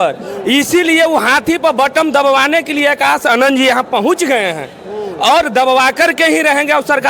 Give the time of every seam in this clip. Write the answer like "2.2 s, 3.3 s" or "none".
none

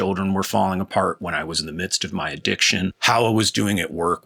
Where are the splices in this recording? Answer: 3.0 s

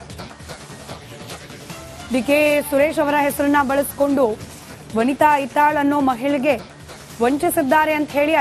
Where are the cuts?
1.8 s

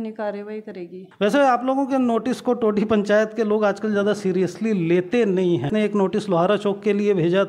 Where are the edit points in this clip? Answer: 1.1 s, 5.7 s

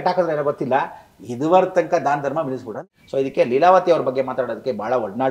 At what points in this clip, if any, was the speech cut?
2.7 s

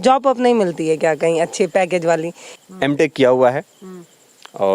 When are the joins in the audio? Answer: 2.5 s

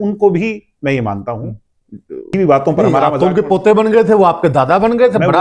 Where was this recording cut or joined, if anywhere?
2.3 s

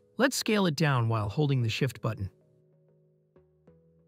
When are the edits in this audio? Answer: none

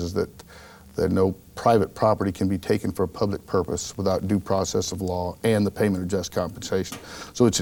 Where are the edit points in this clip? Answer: none

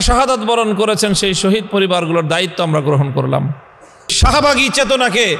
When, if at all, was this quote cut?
4.1 s

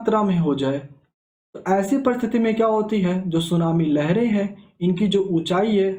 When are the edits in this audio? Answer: none

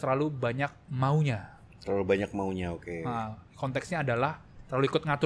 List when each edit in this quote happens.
none

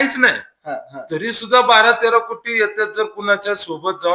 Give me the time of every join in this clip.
none

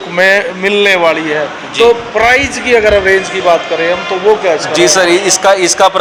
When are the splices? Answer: none

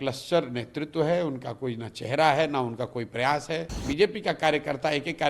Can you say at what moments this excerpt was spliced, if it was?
3.8 s

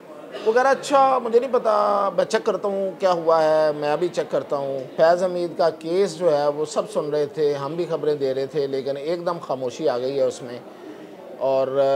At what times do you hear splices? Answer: 4.9 s

